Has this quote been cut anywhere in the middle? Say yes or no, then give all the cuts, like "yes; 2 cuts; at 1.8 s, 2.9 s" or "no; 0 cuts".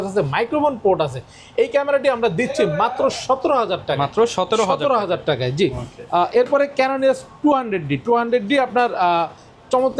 no; 0 cuts